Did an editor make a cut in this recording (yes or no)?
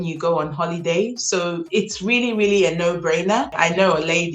yes